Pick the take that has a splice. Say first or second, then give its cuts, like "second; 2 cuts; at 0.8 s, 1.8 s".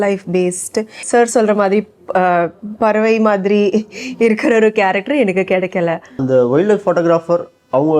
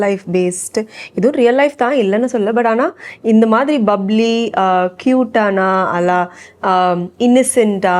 first; 2 cuts; at 1.0 s, 6.2 s